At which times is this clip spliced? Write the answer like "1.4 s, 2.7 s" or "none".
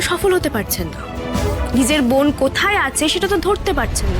1.6 s